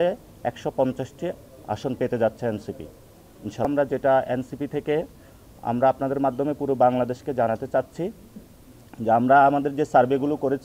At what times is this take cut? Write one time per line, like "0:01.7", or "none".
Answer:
0:03.7